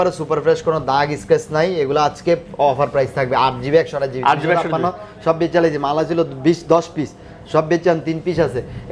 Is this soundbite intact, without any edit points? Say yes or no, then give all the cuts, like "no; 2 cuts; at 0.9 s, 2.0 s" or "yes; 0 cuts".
yes; 0 cuts